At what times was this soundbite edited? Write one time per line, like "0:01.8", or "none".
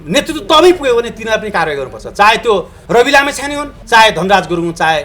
0:02.8
0:03.7

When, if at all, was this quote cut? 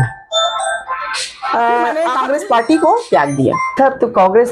0:02.1

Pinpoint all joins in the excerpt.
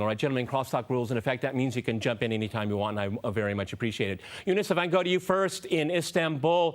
0:01.3

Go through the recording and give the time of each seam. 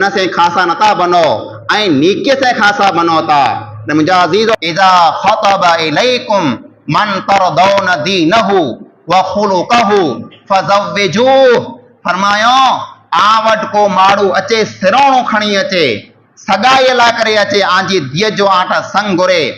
0:04.6

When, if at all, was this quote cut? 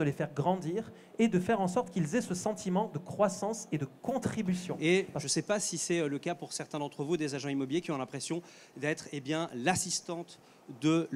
0:04.7

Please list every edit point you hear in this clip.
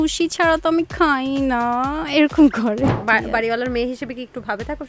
0:03.0

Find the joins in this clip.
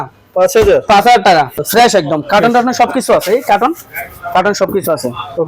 0:01.6

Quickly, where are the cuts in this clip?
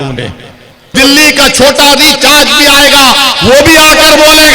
0:00.9

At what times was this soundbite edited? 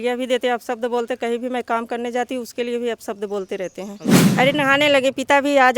0:04.1

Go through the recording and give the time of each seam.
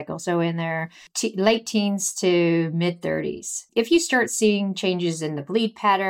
0:01.0
0:03.6

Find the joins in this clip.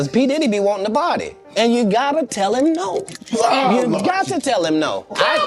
0:01.3

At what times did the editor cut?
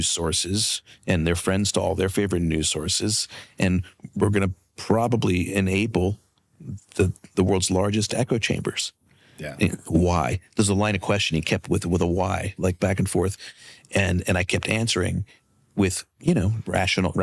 none

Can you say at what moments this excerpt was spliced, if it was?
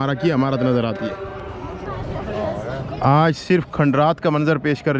none

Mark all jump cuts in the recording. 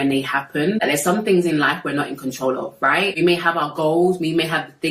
0:00.8
0:03.2

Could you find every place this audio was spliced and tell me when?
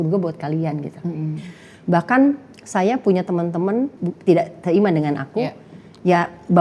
0:04.0

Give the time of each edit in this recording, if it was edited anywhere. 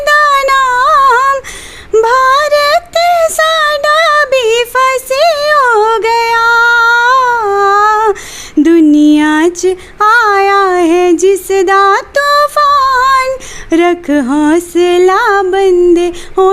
none

